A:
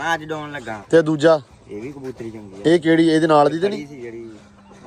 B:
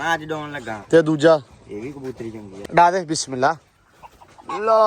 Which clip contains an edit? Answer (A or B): B